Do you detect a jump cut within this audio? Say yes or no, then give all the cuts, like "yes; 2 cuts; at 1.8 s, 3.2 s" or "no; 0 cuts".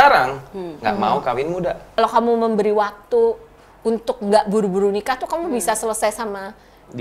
yes; 1 cut; at 2.0 s